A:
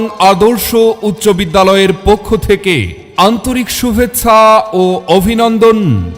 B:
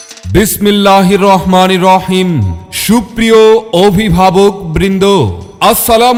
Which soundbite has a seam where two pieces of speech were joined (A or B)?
A